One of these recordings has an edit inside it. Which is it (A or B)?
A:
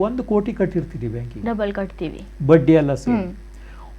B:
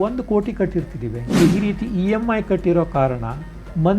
B